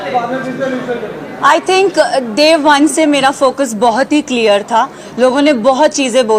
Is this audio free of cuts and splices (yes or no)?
no